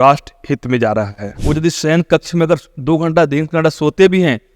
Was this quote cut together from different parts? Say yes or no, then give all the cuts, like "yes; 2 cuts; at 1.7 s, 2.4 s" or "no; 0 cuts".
yes; 1 cut; at 1.2 s